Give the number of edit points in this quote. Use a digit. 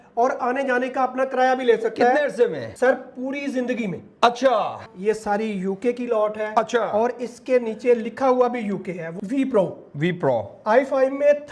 3